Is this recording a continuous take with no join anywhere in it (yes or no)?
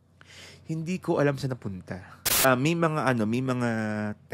no